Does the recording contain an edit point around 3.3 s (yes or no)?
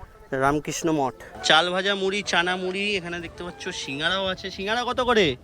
no